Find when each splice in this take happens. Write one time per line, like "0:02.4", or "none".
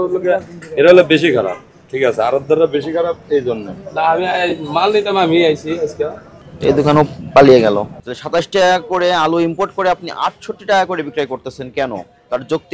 0:07.9

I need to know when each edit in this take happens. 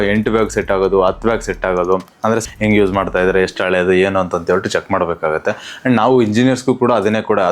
0:02.5

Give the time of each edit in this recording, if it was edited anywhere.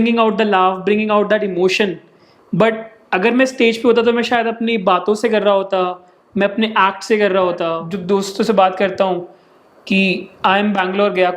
0:07.9

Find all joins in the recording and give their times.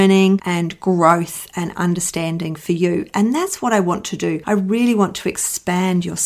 none

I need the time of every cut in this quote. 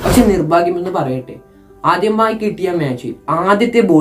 none

